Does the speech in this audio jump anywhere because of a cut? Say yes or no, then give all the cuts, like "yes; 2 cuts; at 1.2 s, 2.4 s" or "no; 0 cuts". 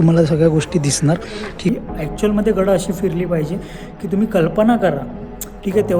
yes; 1 cut; at 1.7 s